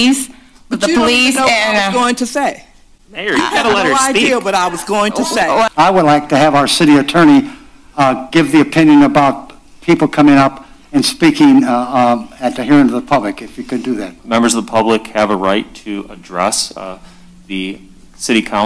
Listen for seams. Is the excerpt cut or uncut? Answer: cut